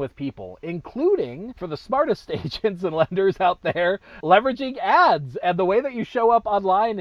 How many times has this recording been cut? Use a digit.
1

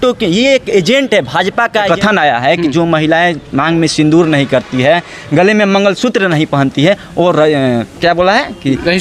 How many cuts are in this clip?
1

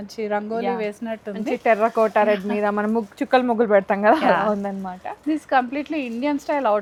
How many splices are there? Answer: 0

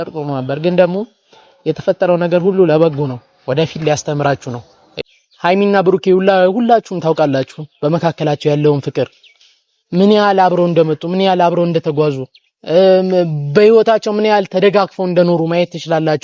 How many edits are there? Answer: 1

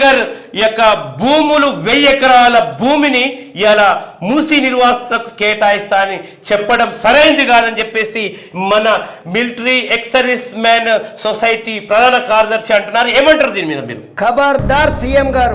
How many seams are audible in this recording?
1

